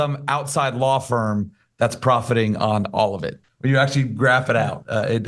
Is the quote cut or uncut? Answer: cut